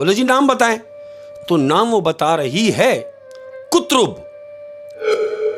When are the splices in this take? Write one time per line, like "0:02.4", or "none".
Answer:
none